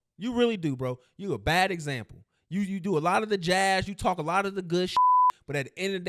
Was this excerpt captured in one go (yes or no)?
yes